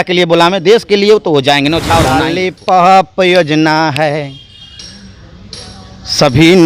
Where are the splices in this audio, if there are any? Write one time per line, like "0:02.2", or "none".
0:02.4